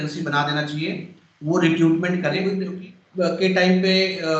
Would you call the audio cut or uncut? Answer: cut